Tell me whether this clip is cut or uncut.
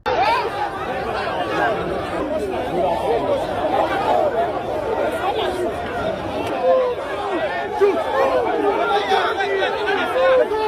cut